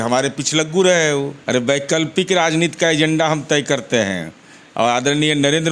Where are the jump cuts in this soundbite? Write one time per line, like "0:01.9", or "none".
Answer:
0:01.4